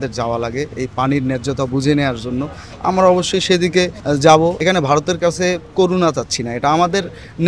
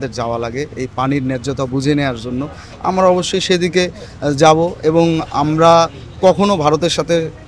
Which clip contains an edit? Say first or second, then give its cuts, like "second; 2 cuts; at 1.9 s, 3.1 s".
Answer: first; 2 cuts; at 4.0 s, 4.6 s